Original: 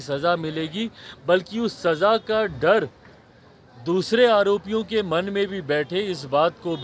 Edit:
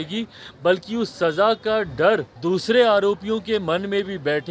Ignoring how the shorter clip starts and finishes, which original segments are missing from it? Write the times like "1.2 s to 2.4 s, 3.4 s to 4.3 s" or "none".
3.0 s to 3.8 s